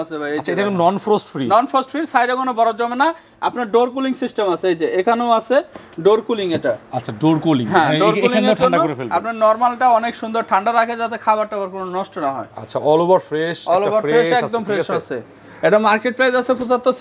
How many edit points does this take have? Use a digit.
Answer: 0